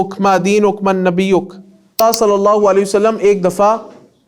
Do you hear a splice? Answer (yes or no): yes